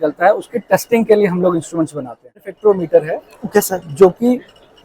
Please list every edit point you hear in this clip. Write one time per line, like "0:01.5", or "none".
0:02.5